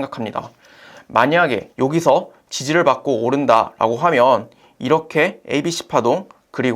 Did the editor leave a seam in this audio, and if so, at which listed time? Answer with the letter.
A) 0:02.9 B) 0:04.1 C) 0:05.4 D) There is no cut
C